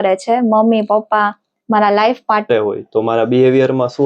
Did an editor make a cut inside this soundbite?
yes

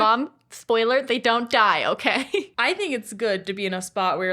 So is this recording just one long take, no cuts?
no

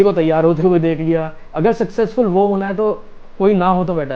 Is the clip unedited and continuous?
no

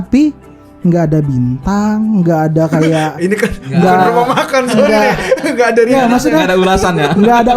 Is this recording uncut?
yes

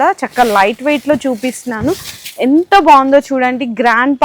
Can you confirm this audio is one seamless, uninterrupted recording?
yes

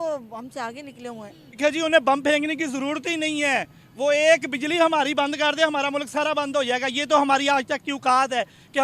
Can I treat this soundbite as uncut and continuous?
no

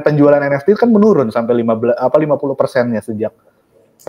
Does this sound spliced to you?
no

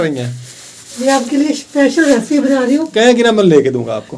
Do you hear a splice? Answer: yes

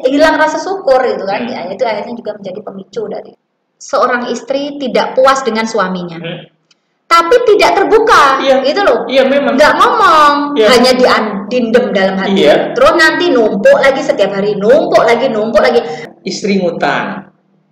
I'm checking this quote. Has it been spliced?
yes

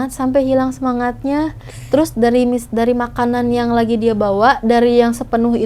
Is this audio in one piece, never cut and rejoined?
yes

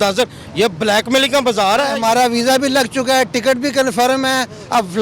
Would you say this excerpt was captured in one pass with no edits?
no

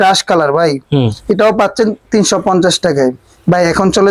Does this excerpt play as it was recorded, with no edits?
yes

